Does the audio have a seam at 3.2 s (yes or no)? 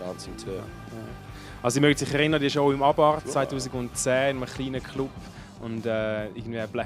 no